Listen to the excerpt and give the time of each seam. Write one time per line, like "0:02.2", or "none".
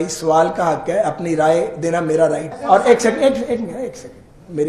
0:02.5